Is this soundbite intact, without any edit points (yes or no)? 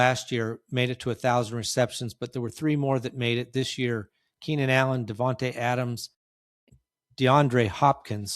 no